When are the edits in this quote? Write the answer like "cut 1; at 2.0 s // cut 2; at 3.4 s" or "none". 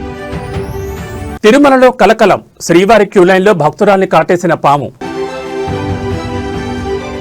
cut 1; at 1.3 s